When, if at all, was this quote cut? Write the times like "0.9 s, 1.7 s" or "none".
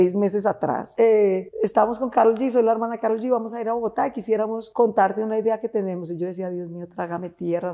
0.8 s, 1.5 s, 4.6 s

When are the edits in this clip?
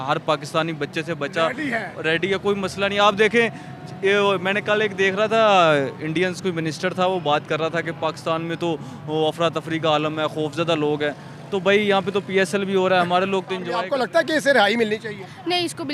13.7 s

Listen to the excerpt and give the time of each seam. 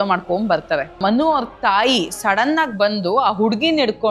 1.0 s

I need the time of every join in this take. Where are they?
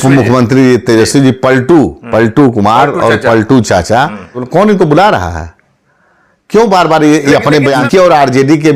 4.4 s, 7.9 s

